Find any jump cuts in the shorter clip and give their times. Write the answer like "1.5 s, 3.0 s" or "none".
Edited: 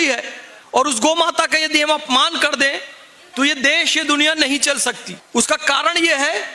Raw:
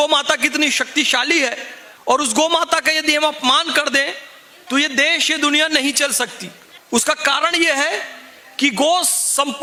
5.1 s

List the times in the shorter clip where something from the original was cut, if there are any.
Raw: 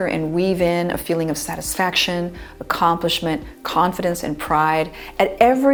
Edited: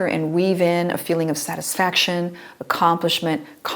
none

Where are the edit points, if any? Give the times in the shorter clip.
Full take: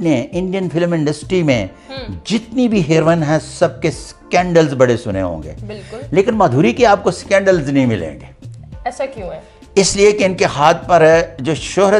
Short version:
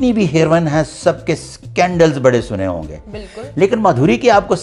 none

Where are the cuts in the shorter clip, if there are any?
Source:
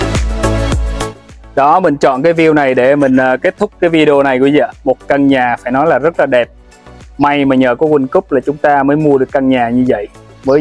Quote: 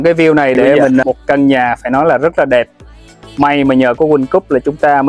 1.0 s

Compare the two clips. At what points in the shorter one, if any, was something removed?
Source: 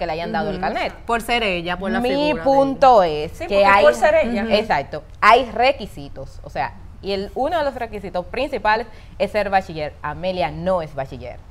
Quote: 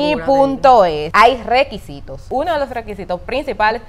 1.0 s, 2.2 s

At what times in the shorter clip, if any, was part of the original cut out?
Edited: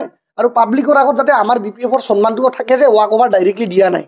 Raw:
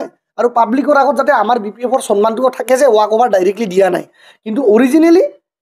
none

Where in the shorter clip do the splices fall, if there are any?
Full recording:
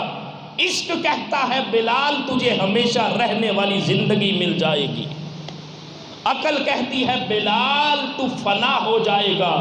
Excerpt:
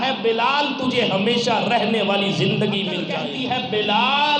3.2 s

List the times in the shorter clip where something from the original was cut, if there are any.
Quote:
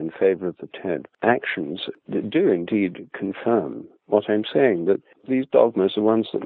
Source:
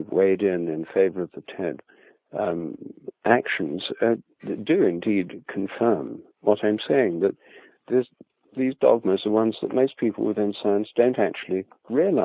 1.1 s, 1.9 s, 5.1 s

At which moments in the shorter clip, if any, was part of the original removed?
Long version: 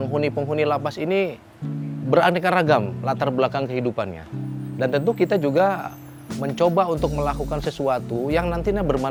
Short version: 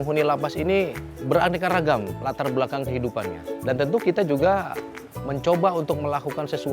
1.1 s, 3.4 s

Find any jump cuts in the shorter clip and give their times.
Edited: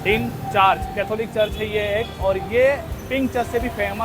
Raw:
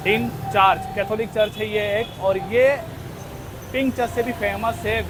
2.9 s

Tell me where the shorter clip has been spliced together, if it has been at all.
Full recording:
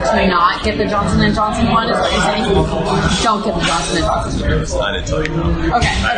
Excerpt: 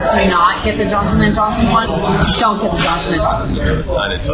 1.9 s

